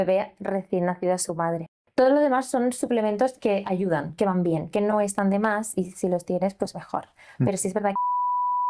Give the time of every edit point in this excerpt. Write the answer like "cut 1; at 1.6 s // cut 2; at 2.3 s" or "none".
cut 1; at 1.8 s